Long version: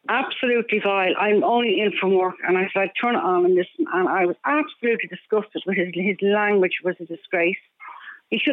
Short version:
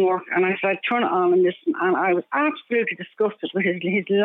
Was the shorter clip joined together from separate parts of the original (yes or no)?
no